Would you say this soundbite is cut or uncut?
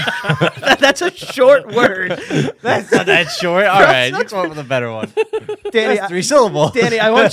uncut